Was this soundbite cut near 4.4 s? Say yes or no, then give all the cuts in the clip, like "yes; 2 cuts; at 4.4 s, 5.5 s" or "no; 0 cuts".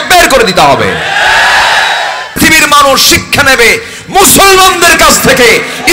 no; 1 cut; at 2.4 s